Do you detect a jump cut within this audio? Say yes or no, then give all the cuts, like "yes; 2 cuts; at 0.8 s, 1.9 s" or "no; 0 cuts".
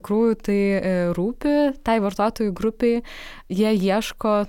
no; 0 cuts